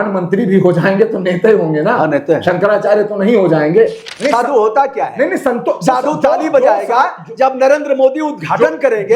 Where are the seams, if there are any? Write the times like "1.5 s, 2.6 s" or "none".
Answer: 4.1 s